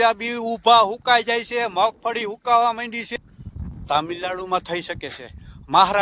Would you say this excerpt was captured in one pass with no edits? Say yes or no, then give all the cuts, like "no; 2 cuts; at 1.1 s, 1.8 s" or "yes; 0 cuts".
no; 1 cut; at 3.0 s